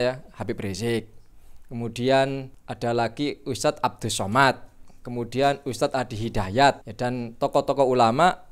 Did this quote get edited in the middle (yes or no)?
yes